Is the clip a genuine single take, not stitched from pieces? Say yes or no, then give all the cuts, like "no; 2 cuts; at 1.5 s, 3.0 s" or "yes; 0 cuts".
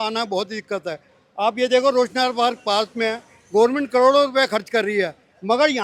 yes; 0 cuts